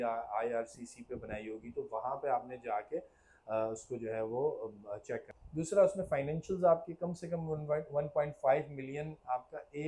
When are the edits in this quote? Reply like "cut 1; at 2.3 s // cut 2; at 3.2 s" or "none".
cut 1; at 5.4 s